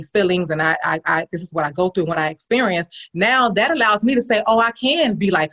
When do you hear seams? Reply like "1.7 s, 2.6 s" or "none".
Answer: none